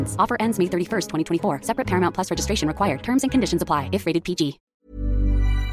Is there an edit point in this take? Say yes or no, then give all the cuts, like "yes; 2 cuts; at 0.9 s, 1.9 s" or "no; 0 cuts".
yes; 1 cut; at 4.6 s